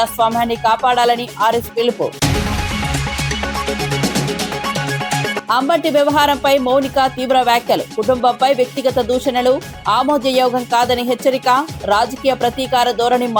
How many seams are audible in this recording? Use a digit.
0